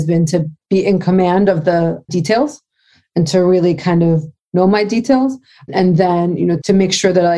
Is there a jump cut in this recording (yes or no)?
yes